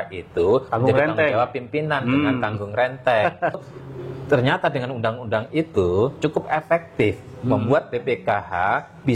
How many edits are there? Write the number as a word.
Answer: one